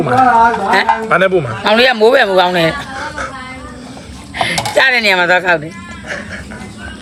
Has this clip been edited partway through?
no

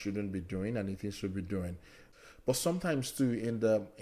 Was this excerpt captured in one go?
no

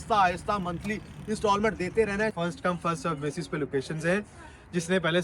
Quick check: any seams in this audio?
yes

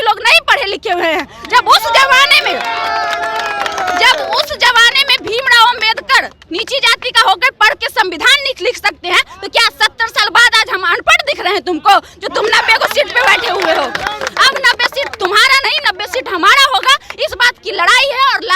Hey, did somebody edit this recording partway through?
no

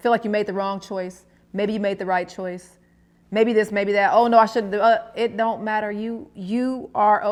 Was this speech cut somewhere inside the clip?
no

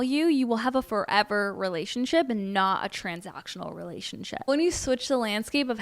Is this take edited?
yes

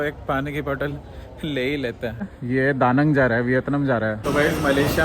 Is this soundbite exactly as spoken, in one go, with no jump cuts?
no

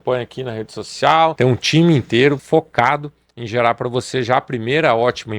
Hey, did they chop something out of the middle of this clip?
yes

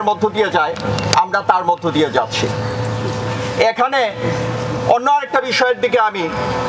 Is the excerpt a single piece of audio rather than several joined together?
yes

